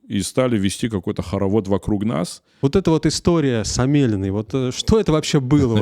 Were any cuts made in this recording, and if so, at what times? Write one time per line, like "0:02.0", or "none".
0:02.4